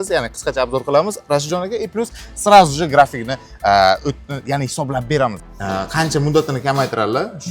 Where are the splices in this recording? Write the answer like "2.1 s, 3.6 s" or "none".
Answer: 5.4 s